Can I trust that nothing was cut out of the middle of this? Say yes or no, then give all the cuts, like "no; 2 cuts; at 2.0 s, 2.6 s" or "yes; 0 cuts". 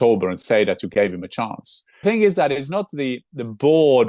no; 1 cut; at 2.0 s